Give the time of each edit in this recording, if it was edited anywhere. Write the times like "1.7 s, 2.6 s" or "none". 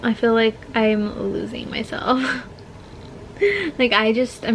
none